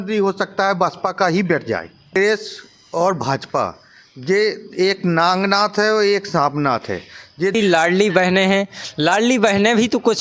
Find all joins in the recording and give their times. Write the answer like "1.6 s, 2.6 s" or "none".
2.1 s, 7.5 s